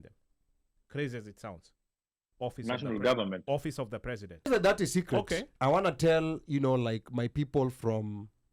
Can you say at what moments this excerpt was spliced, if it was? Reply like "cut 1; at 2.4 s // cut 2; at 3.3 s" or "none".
cut 1; at 4.5 s